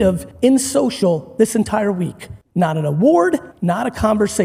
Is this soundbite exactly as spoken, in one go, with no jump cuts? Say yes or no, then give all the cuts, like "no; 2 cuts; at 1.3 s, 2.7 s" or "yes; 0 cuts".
yes; 0 cuts